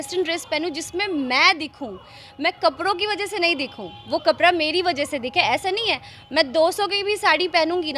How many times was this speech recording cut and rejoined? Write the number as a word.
zero